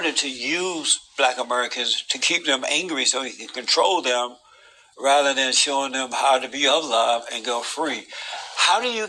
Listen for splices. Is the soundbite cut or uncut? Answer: uncut